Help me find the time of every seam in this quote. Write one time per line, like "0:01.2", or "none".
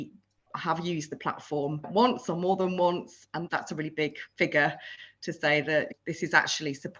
0:03.4